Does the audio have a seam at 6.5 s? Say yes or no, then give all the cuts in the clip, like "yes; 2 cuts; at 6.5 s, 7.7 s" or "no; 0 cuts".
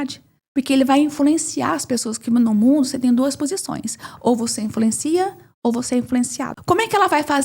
yes; 1 cut; at 6.5 s